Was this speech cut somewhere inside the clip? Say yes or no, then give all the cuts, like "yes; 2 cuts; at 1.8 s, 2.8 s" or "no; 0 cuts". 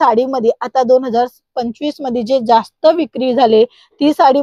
no; 0 cuts